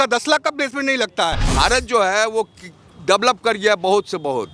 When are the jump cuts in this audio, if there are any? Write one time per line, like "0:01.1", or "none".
0:01.4

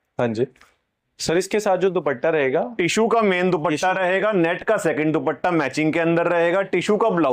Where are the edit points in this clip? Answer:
none

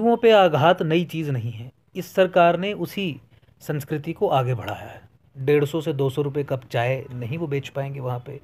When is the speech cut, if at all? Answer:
0:05.3

